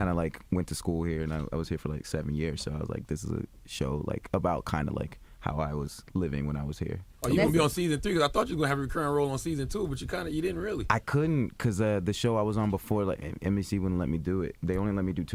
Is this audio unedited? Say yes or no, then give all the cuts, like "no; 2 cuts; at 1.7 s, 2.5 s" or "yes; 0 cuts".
yes; 0 cuts